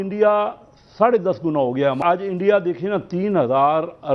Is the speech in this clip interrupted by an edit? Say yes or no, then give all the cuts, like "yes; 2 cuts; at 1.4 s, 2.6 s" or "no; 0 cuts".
yes; 1 cut; at 2.0 s